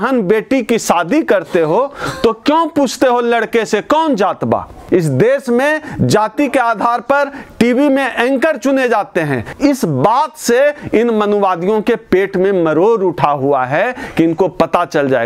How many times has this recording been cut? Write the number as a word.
two